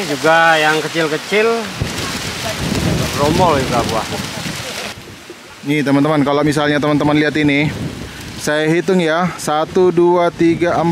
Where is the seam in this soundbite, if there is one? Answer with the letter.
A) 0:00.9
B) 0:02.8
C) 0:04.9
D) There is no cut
C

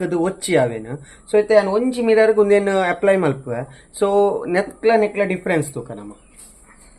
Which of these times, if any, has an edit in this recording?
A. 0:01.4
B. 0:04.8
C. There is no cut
C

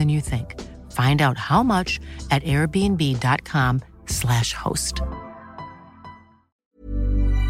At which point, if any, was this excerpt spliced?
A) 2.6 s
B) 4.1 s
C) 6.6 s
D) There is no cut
C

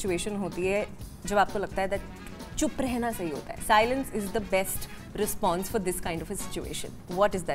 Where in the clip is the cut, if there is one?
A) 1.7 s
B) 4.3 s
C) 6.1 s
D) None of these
D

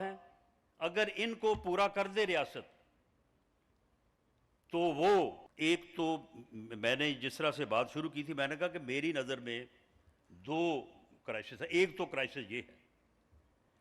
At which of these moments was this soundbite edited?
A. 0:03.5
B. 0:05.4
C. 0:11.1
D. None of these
B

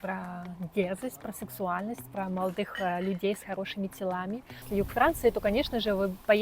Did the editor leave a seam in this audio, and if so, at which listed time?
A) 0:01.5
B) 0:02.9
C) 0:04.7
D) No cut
C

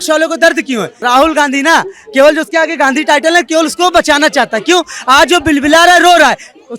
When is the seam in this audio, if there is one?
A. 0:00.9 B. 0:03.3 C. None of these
A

